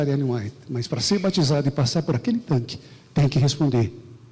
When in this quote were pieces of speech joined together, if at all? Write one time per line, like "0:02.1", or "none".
none